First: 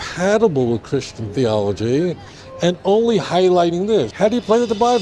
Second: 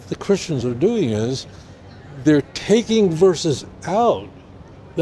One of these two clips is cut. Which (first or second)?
first